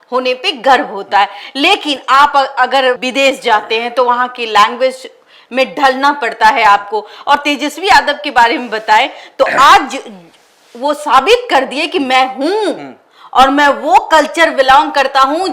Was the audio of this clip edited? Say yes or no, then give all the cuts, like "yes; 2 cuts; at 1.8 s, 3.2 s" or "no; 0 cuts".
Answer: no; 0 cuts